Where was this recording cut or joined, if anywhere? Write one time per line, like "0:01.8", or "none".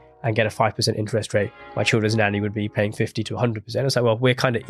none

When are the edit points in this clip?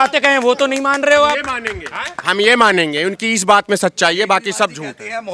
none

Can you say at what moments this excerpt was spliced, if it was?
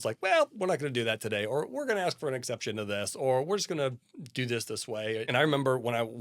0:05.3

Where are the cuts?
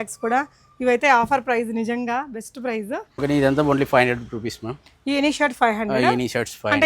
0:03.2

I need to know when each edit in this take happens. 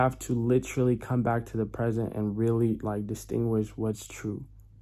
none

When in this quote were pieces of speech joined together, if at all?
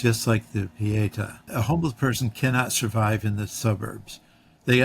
0:01.5

